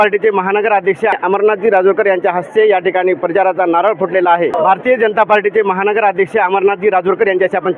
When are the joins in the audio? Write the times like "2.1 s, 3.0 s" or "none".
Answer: 1.2 s, 4.6 s